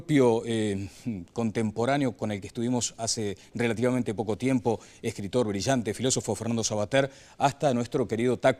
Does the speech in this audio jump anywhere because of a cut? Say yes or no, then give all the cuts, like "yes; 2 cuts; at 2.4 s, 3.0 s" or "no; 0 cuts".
no; 0 cuts